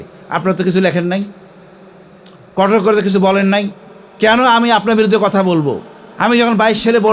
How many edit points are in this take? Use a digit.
0